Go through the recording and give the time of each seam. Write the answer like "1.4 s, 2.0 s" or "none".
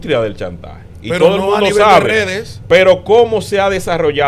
none